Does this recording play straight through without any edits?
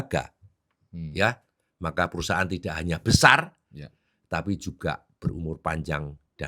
yes; 0 cuts

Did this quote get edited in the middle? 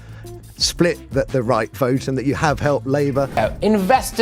yes; 1 cut; at 3.3 s

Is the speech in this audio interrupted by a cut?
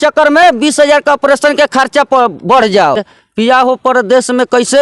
yes; 1 cut; at 2.7 s

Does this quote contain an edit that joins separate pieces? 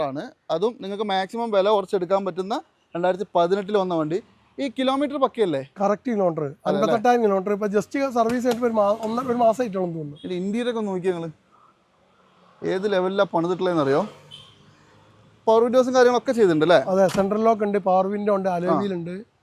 no; 0 cuts

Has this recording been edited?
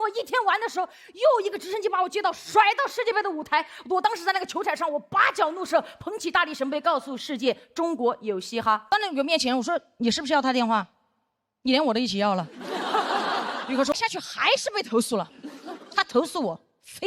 yes; 2 cuts; at 8.9 s, 13.9 s

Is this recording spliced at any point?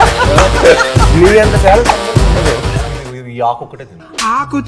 yes; 1 cut; at 2.8 s

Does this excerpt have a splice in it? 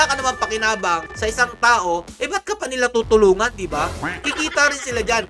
no; 0 cuts

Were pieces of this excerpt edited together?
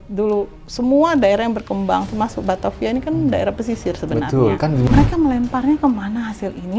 yes; 1 cut; at 4.9 s

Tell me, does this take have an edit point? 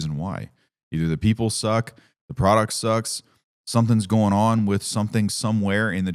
no; 0 cuts

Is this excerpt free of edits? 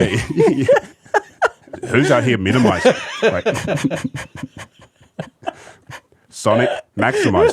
no; 1 cut; at 1.8 s

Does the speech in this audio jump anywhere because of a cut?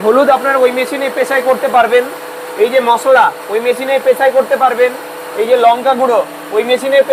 no; 0 cuts

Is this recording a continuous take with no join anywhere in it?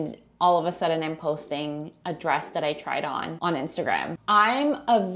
no; 2 cuts; at 3.3 s, 4.1 s

